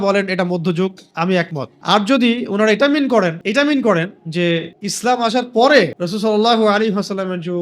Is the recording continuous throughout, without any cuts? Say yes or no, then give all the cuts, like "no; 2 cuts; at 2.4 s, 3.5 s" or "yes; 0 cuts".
no; 4 cuts; at 1.7 s, 3.4 s, 4.8 s, 6.0 s